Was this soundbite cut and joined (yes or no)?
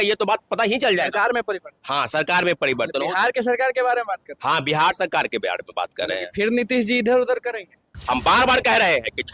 yes